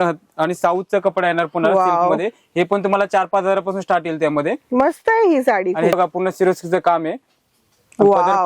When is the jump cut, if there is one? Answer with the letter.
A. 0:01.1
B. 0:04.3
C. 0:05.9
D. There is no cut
C